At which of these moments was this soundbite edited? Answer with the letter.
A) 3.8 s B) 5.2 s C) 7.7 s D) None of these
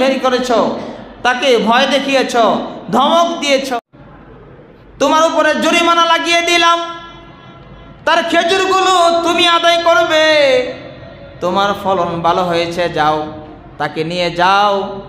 A